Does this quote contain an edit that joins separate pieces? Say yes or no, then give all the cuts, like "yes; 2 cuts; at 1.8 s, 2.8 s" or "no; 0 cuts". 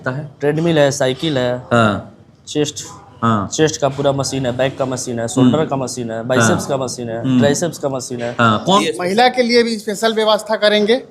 yes; 1 cut; at 8.8 s